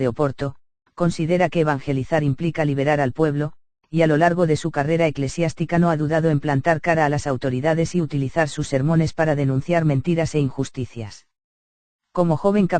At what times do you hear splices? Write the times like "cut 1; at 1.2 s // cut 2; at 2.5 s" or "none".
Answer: cut 1; at 10.6 s